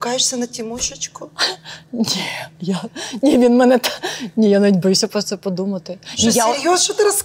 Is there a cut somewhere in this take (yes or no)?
no